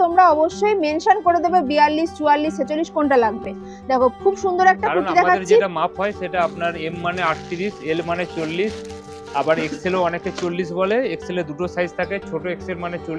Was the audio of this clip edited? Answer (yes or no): no